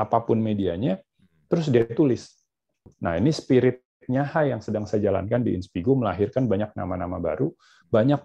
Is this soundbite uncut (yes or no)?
no